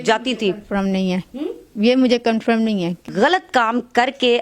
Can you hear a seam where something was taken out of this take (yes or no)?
yes